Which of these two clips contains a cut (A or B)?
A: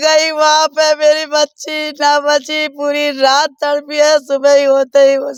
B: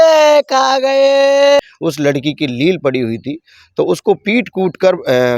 B